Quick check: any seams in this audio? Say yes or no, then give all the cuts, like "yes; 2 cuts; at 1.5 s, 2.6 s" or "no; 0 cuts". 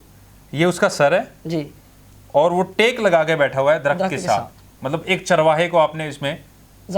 no; 0 cuts